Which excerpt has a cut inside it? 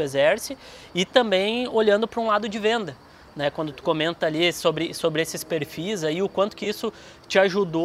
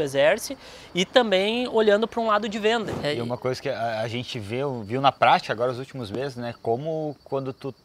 second; 1 cut; at 2.9 s

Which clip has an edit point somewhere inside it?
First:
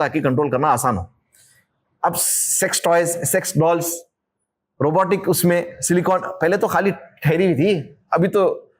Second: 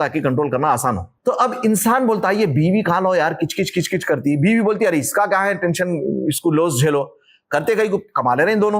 second; 1 cut; at 1.1 s

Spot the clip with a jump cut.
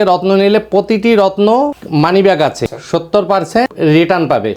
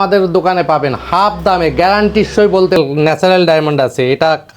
second; 1 cut; at 2.8 s

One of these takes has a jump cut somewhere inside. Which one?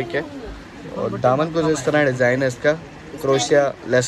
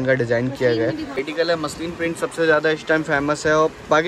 second; 1 cut; at 1.3 s

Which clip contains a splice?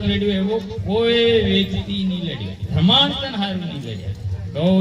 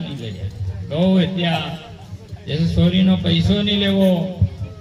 first; 1 cut; at 2.7 s

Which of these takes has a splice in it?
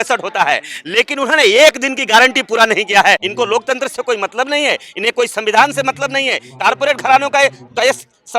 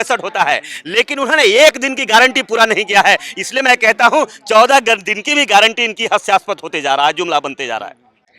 first; 2 cuts; at 3.3 s, 6.4 s

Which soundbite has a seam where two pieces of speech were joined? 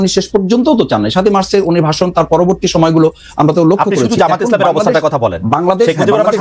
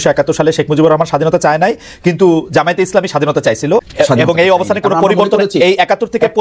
second; 1 cut; at 3.9 s

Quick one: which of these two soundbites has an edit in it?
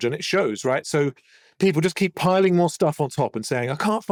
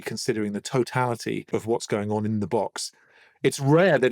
second; 1 cut; at 1.4 s

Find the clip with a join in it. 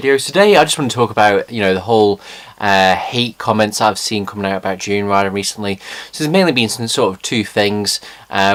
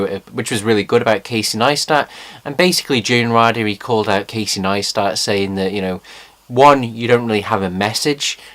second; 1 cut; at 2.1 s

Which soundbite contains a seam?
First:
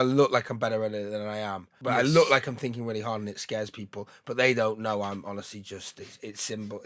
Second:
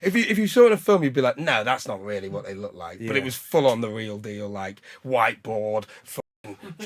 first; 1 cut; at 1.7 s

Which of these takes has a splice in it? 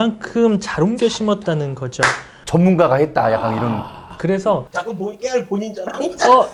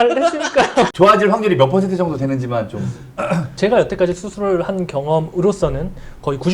second; 2 cuts; at 0.9 s, 3.5 s

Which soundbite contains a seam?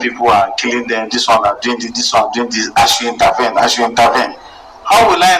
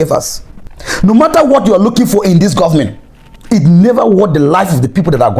second; 1 cut; at 1.0 s

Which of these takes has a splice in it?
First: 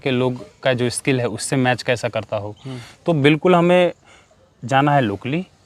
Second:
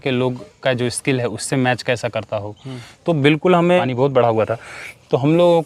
second; 1 cut; at 3.8 s

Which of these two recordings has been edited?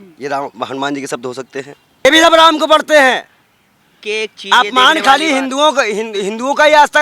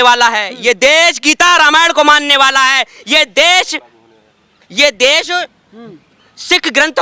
first; 1 cut; at 2.0 s

